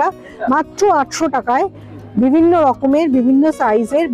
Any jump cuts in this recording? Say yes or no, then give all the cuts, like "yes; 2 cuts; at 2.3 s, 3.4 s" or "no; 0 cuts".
no; 0 cuts